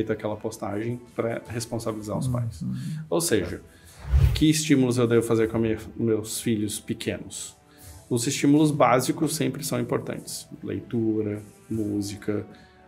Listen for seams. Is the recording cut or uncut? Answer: cut